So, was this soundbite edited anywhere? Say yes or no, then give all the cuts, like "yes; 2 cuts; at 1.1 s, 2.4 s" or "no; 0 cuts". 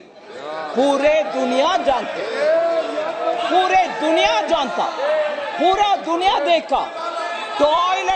no; 0 cuts